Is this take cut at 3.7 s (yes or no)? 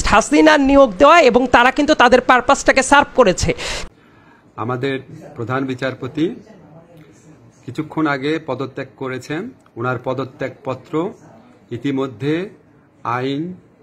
yes